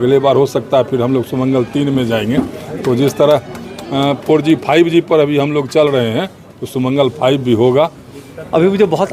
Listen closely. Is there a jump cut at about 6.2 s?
no; 1 cut; at 8.1 s

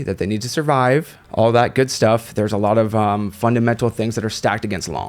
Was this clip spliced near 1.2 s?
yes; 1 cut; at 1.2 s

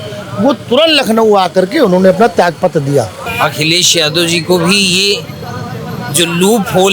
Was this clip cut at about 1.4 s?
no; 1 cut; at 3.2 s

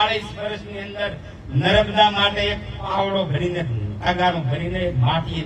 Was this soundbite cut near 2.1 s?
no; 0 cuts

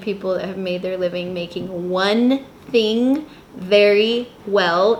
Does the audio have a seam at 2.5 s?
no; 0 cuts

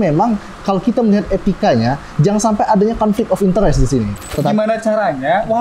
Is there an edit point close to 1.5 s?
no; 1 cut; at 4.3 s

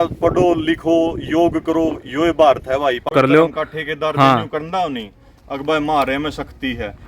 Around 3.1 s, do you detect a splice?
yes; 1 cut; at 3.1 s

